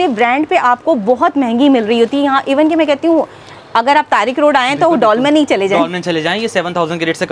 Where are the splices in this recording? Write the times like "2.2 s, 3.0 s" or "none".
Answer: none